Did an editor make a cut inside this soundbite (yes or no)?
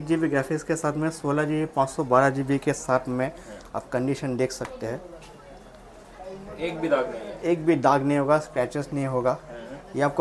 no